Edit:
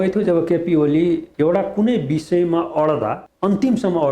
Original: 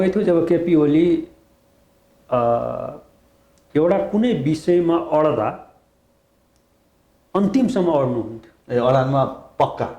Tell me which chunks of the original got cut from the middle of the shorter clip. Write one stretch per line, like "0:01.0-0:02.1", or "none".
0:01.3-0:03.6
0:05.6-0:07.2